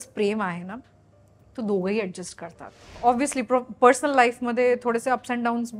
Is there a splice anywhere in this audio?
yes; 1 cut; at 3.0 s

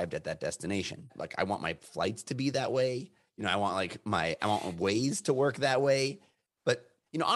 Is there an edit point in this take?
yes; 1 cut; at 1.1 s

